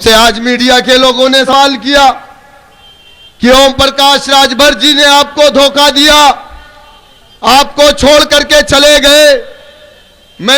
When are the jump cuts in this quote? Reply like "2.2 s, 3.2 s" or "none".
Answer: 1.5 s